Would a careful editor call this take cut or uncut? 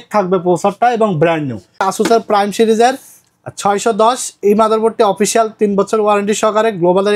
cut